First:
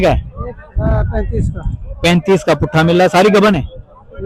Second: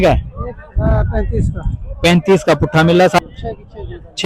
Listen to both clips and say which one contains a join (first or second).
second